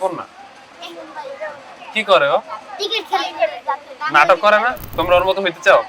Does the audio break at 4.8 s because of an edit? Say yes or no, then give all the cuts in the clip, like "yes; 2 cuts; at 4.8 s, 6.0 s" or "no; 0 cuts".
yes; 1 cut; at 4.8 s